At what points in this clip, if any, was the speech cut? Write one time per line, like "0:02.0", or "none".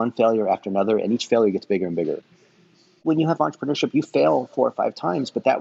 0:02.9

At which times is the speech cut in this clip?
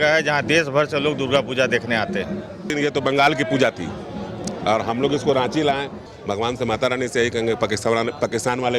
0:02.7
0:06.0

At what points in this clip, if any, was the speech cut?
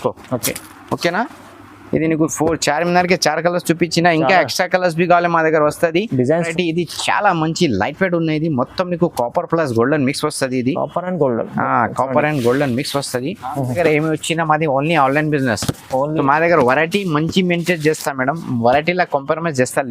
0:06.5
0:13.8

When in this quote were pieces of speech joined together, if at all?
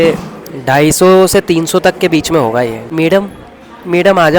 0:02.8

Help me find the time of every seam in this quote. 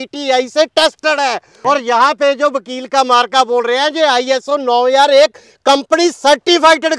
0:01.5

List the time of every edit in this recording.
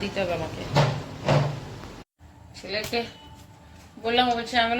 0:01.8

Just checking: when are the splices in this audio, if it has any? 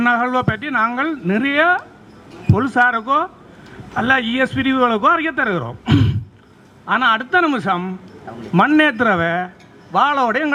none

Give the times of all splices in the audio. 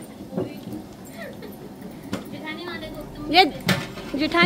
none

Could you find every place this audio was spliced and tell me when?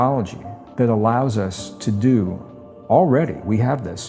none

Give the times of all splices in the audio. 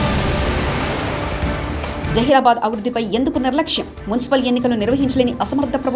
0:01.8

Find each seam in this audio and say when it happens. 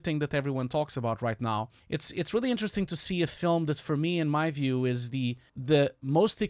0:01.8
0:05.5

